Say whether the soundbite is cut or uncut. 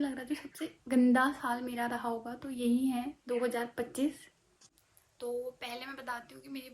cut